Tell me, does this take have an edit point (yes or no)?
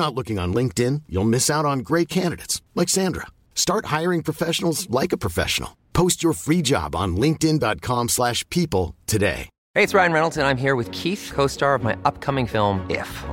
yes